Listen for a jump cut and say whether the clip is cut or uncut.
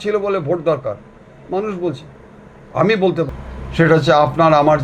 cut